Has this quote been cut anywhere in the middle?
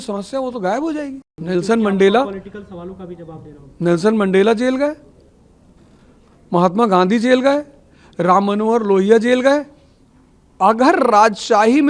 yes; 1 cut; at 1.2 s

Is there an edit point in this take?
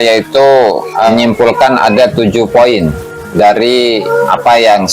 yes; 2 cuts; at 1.1 s, 4.1 s

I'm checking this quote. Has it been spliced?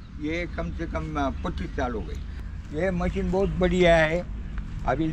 yes; 1 cut; at 2.4 s

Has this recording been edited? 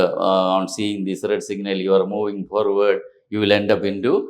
no; 0 cuts

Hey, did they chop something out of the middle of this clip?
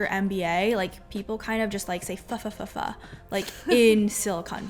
no; 0 cuts

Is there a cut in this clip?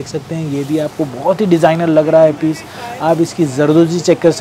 no; 0 cuts

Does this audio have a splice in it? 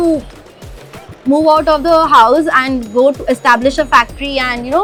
no; 0 cuts

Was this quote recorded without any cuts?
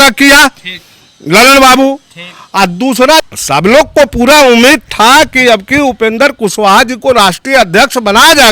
no; 1 cut; at 3.3 s

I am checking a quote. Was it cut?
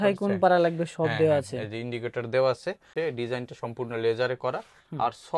yes; 1 cut; at 2.9 s

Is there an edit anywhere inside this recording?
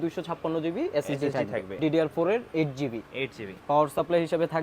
yes; 2 cuts; at 1.8 s, 3.5 s

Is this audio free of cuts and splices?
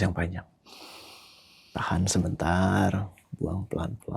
no; 1 cut; at 3.2 s

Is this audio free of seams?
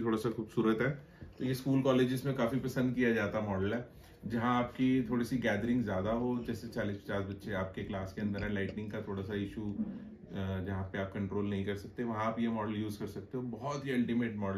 yes; 0 cuts

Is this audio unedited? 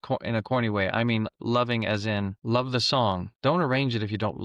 no; 2 cuts; at 2.4 s, 3.3 s

